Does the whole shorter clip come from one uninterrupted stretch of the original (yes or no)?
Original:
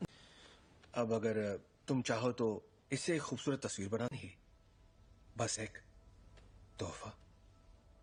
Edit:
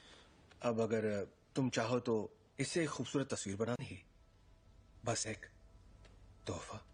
yes